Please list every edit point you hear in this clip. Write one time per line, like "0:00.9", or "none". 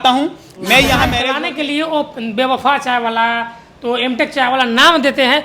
0:01.2